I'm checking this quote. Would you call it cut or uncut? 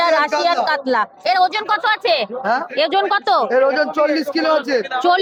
uncut